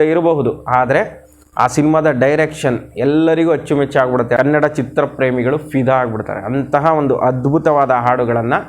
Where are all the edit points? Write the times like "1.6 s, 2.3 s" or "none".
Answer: 4.4 s